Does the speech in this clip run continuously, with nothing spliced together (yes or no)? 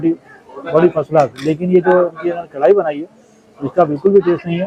yes